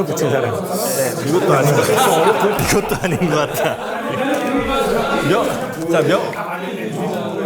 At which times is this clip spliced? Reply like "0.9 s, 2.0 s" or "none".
none